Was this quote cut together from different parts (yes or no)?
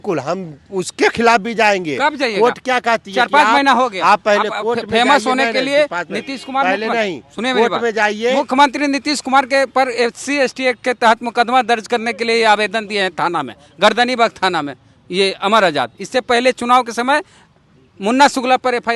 no